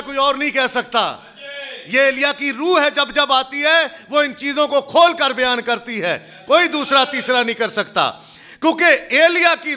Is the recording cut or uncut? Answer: uncut